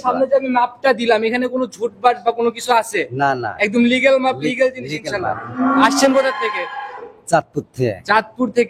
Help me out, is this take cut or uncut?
uncut